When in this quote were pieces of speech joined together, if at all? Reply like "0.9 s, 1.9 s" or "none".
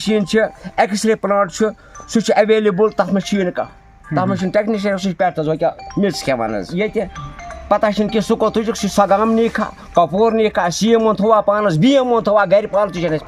6.7 s